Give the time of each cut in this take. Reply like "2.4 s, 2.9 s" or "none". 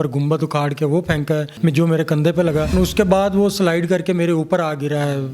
1.5 s, 2.7 s